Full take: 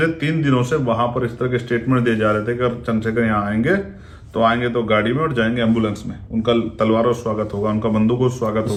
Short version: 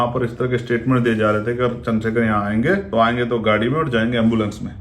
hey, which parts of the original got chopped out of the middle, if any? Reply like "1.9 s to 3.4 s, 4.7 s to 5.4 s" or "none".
3.9 s to 4.3 s